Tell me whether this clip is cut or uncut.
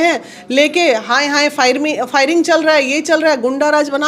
uncut